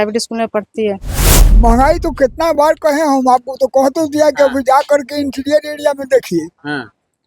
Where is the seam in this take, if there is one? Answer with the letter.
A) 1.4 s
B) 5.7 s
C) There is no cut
A